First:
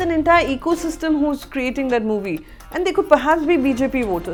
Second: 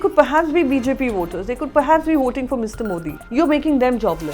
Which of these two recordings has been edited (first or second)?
second